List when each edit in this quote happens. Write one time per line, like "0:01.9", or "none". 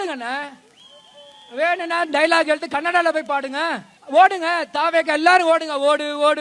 0:03.9